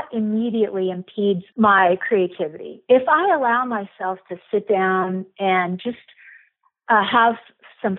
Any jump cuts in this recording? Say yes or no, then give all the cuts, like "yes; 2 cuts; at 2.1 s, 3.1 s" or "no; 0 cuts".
yes; 1 cut; at 1.5 s